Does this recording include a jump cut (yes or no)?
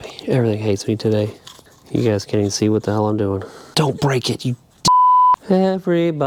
no